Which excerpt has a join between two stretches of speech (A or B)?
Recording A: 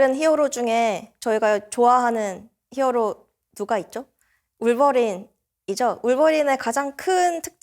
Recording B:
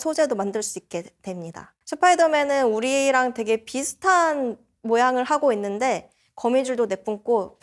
B